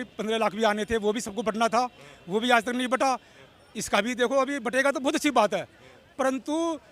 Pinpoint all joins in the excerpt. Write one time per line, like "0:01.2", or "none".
none